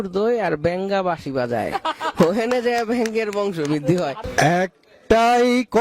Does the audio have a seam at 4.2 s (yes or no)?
yes